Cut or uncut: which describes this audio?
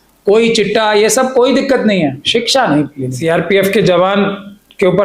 cut